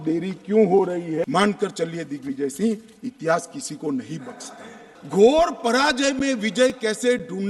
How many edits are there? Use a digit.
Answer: 2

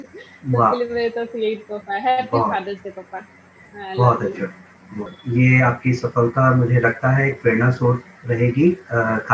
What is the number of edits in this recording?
1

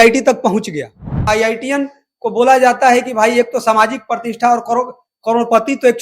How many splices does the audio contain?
1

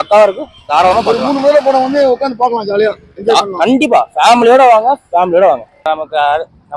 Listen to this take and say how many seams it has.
1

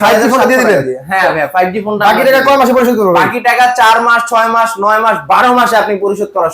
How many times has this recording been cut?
0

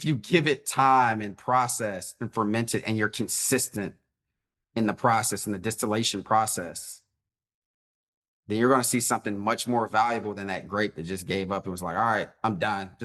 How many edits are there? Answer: 0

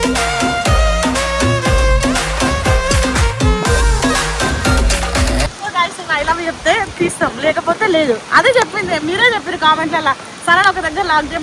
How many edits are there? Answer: 1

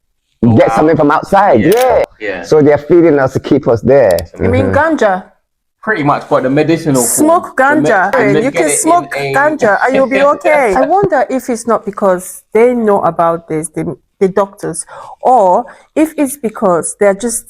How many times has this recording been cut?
4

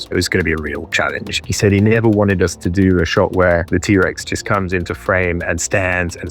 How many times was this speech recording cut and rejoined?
1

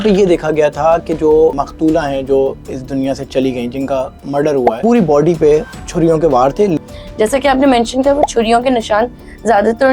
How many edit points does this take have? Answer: 3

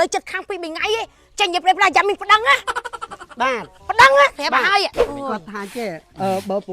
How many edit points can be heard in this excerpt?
1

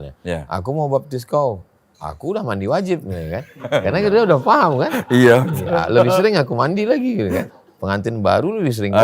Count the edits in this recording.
1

